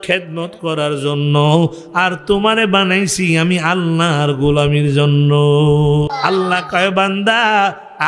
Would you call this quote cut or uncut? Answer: cut